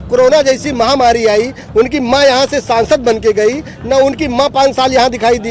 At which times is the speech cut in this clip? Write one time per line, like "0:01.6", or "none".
none